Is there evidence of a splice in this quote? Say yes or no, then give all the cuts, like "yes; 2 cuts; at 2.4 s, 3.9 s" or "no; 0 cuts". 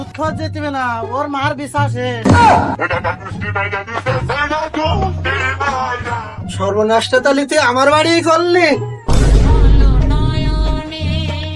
no; 0 cuts